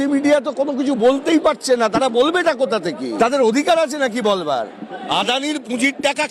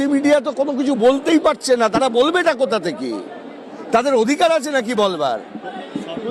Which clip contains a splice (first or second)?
first